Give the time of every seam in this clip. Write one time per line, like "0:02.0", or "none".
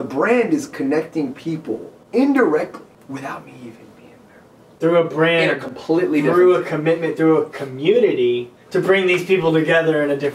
0:01.9
0:02.9
0:04.8
0:08.5